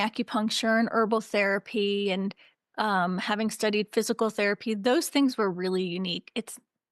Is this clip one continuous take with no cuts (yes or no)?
yes